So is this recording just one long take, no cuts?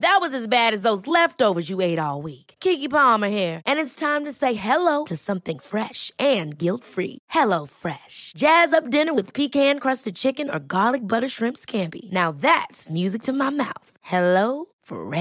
yes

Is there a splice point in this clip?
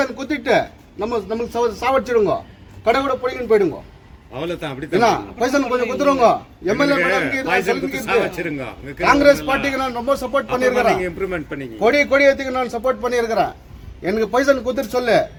no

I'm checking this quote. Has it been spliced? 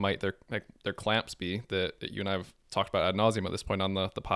no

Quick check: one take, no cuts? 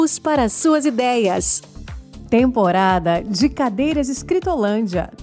yes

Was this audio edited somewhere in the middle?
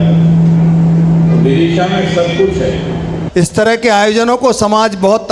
yes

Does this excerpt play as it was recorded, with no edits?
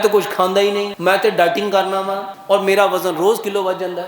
no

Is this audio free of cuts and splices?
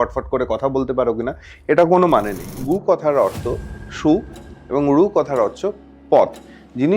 no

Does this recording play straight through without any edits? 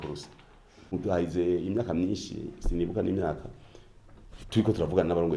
no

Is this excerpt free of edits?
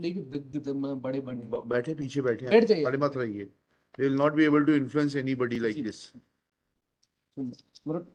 yes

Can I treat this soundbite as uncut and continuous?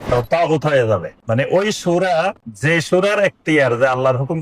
no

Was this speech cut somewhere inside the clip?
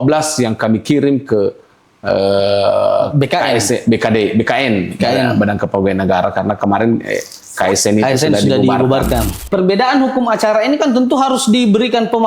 yes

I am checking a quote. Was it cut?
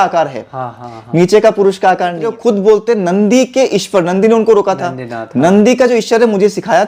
yes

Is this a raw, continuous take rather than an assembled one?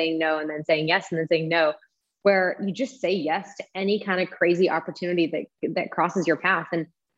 yes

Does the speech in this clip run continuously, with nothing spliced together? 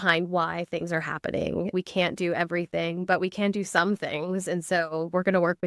no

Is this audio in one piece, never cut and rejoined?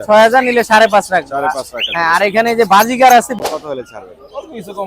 no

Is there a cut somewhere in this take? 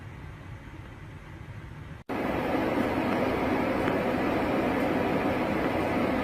no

